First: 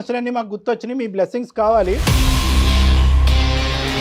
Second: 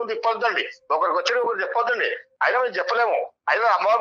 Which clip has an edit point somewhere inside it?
first; 1 cut; at 2.0 s

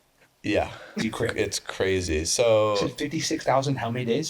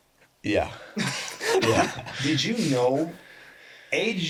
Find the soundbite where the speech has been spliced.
first; 1 cut; at 1.0 s

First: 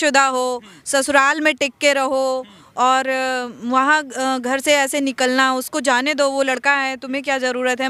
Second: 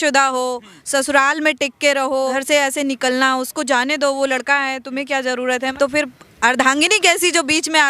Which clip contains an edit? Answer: second; 2 cuts; at 2.3 s, 5.7 s

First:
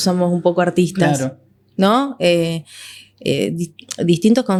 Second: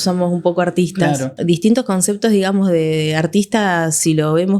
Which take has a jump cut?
second; 1 cut; at 1.3 s

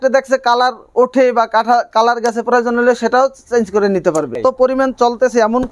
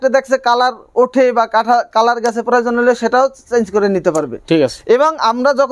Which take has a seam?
first; 1 cut; at 4.4 s

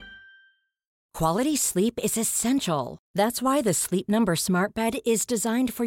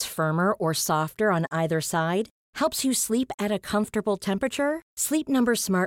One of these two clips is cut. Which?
first; 1 cut; at 1.0 s

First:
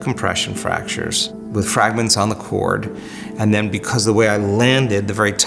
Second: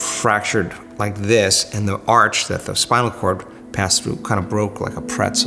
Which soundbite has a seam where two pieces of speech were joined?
first; 1 cut; at 1.4 s

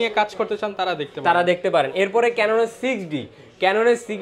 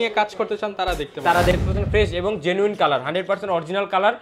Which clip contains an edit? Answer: second; 1 cut; at 1.5 s

